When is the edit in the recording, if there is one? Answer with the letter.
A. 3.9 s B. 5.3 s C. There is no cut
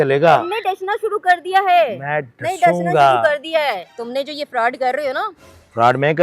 A